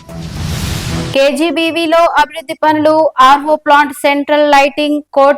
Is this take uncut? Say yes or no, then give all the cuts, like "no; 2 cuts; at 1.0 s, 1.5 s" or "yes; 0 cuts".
no; 1 cut; at 1.1 s